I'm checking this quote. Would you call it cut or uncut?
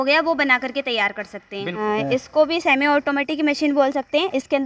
cut